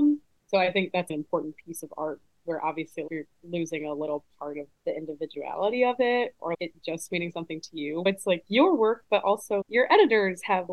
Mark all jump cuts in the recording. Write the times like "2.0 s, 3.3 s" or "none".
none